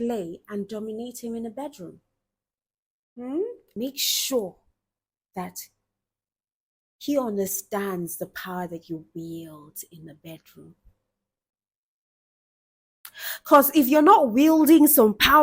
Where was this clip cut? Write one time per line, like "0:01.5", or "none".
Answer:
0:03.8